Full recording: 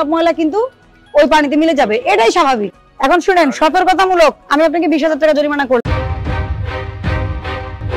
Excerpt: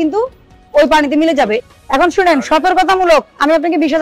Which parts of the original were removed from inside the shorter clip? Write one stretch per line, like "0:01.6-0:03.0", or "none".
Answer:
0:02.0-0:02.7